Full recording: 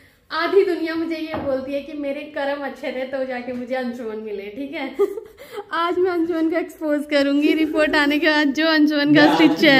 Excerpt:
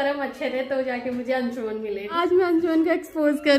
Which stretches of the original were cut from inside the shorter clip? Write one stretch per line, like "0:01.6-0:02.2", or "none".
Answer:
0:04.5-0:05.7

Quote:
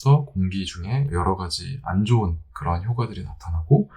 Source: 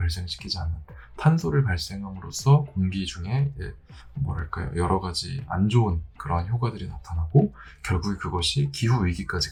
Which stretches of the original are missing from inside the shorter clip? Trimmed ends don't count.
0:03.5-0:04.7

